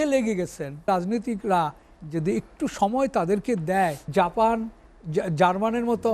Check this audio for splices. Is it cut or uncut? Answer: cut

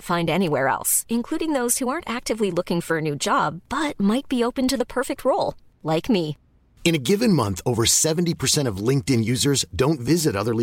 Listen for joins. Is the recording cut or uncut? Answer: uncut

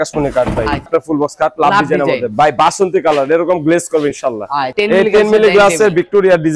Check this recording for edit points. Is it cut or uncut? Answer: cut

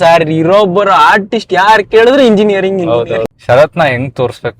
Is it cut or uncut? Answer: cut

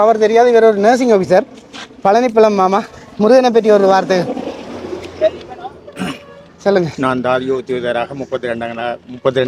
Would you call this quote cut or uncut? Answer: uncut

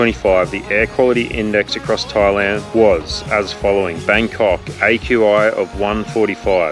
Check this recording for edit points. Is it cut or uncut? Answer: uncut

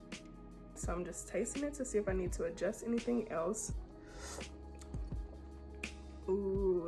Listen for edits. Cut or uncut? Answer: cut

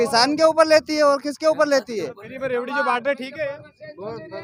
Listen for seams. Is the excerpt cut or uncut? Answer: uncut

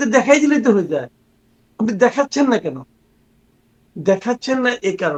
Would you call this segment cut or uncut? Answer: uncut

